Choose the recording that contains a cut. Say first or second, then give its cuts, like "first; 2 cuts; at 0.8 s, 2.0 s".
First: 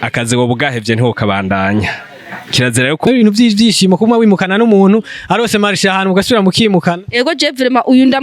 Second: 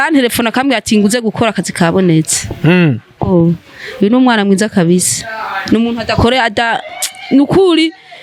first; 1 cut; at 3.1 s